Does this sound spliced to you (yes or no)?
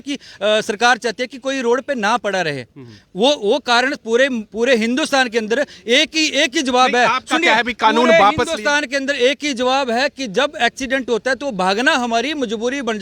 no